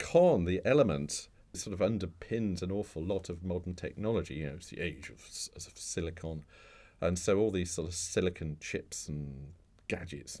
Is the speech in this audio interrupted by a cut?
yes; 1 cut; at 1.6 s

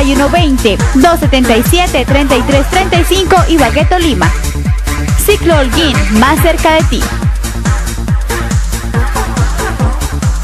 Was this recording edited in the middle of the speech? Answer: no; 0 cuts

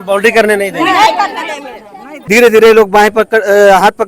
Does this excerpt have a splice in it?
yes; 1 cut; at 2.1 s

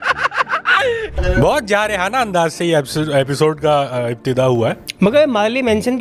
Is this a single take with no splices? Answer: no; 1 cut; at 1.1 s

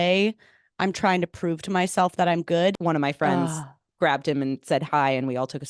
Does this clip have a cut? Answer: yes; 1 cut; at 2.8 s

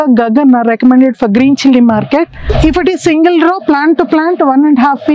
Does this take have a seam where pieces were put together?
yes; 1 cut; at 2.5 s

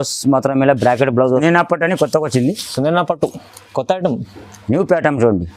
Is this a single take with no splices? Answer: no; 1 cut; at 1.2 s

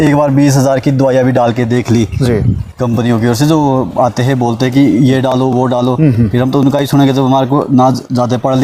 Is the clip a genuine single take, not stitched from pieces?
yes; 0 cuts

